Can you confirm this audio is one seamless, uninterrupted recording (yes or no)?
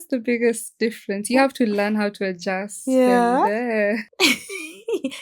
no